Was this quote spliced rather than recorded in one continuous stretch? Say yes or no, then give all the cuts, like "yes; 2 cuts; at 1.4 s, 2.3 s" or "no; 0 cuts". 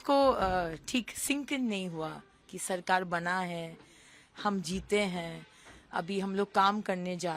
no; 0 cuts